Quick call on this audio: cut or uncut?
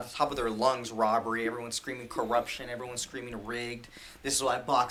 uncut